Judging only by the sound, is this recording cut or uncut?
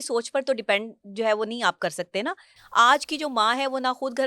cut